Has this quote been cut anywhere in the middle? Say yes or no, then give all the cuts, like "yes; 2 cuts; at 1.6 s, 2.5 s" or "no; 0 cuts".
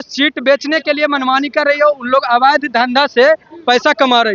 no; 0 cuts